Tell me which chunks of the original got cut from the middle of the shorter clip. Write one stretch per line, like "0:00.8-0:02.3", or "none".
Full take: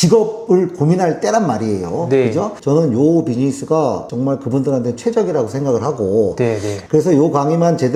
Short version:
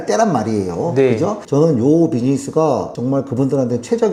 none